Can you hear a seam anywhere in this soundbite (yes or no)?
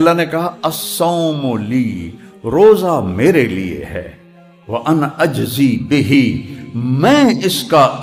no